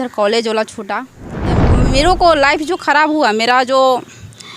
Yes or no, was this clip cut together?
yes